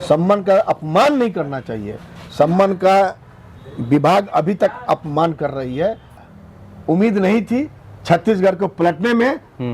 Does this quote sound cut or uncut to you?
cut